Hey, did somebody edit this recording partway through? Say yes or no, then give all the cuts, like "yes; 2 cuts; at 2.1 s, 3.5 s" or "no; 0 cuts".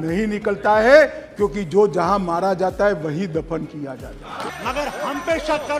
yes; 1 cut; at 4.5 s